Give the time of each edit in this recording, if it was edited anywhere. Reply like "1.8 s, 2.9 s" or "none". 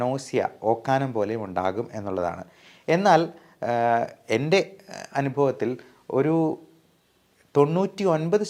none